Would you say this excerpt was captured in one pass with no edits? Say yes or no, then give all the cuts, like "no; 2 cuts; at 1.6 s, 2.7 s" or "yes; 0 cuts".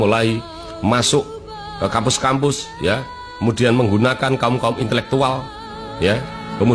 yes; 0 cuts